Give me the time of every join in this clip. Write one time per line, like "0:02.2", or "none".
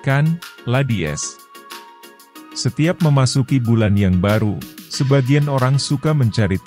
0:01.2
0:02.6

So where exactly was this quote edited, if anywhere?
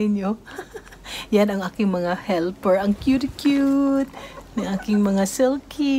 none

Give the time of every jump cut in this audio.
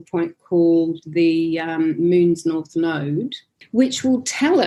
none

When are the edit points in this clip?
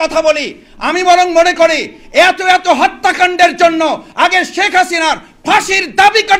none

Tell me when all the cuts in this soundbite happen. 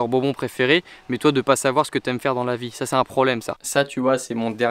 0:03.5

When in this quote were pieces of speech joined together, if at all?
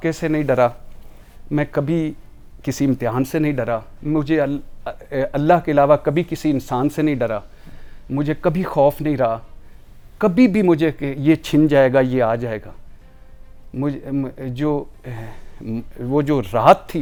none

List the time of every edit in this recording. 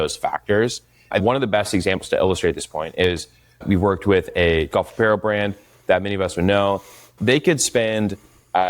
0:01.2
0:04.7

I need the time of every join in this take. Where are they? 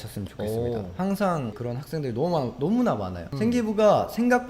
0:01.6

